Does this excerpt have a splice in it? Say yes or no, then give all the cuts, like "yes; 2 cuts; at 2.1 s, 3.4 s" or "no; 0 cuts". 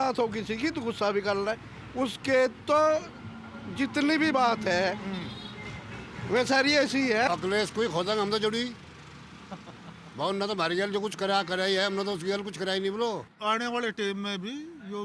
yes; 2 cuts; at 7.3 s, 13.3 s